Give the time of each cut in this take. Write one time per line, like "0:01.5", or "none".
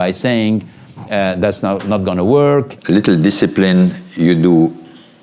0:02.8